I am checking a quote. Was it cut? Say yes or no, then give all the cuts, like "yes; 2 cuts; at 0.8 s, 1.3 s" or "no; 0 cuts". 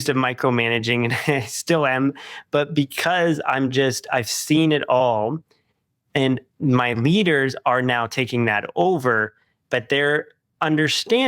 no; 0 cuts